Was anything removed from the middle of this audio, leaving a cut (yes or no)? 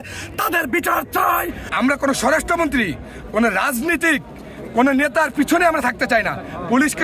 yes